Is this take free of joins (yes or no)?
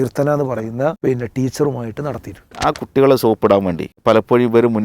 no